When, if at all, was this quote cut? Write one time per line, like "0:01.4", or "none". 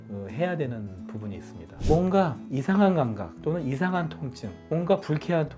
0:01.8